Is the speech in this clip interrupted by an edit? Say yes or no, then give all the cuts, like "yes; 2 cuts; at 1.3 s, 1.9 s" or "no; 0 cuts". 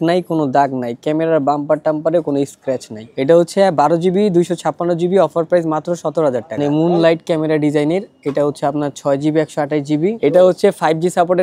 yes; 3 cuts; at 3.0 s, 6.5 s, 10.2 s